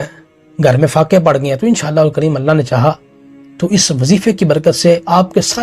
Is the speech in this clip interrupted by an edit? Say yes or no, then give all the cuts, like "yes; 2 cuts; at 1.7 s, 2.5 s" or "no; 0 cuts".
no; 0 cuts